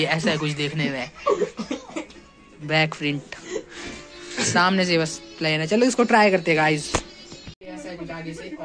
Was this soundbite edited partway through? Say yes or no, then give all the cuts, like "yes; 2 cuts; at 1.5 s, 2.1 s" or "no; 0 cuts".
no; 0 cuts